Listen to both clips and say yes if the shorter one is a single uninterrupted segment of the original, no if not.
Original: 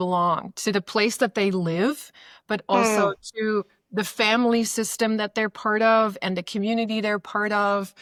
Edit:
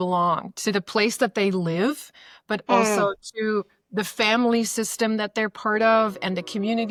yes